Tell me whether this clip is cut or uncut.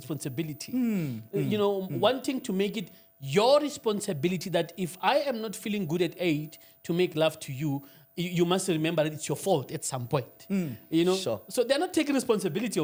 uncut